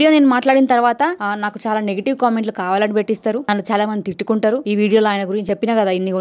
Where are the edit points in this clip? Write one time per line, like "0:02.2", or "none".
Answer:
0:01.2
0:03.4
0:04.6
0:05.4